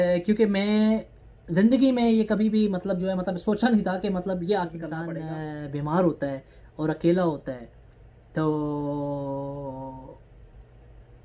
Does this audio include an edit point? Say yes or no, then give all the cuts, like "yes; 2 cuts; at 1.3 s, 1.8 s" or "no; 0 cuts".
yes; 1 cut; at 5.0 s